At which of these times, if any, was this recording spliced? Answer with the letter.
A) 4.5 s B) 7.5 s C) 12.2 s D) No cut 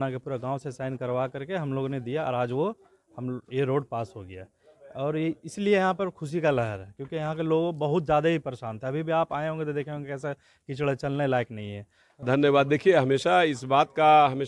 C